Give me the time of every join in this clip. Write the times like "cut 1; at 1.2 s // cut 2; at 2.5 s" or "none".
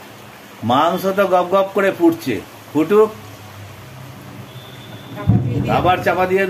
none